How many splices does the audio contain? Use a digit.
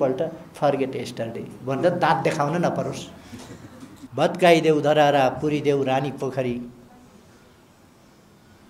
1